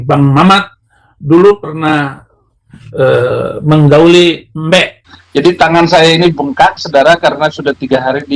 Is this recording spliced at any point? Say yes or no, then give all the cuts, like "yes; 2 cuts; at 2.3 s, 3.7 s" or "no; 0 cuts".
yes; 1 cut; at 5.1 s